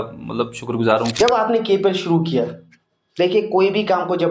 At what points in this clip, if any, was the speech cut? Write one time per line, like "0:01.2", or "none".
0:01.1